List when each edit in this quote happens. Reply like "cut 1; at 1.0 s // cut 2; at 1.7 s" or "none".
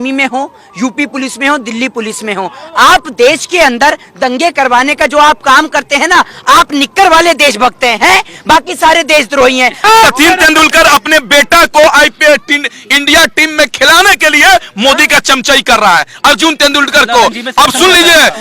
cut 1; at 9.8 s